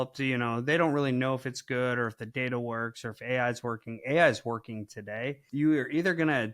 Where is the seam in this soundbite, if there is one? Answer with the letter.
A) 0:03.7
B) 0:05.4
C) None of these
B